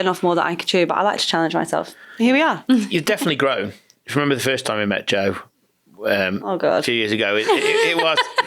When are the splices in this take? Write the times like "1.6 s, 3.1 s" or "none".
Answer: none